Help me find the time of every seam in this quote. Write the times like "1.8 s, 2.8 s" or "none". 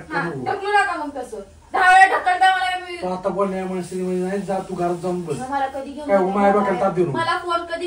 none